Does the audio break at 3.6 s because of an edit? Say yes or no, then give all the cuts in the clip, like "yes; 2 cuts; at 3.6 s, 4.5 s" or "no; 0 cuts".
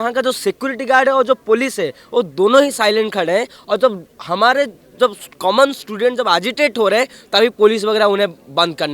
no; 0 cuts